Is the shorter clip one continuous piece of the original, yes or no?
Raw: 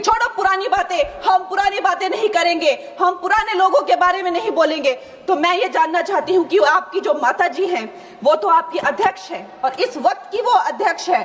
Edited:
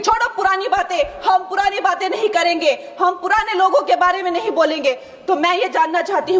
yes